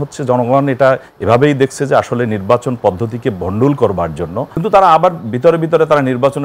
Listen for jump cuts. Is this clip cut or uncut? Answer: cut